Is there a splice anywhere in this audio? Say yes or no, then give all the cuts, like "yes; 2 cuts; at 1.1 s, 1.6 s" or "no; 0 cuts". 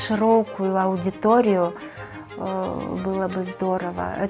no; 0 cuts